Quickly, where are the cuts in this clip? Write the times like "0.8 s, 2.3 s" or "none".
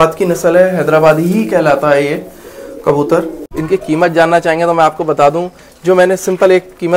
3.6 s